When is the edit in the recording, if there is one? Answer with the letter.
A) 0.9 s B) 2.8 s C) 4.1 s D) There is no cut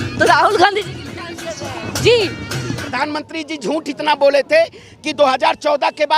B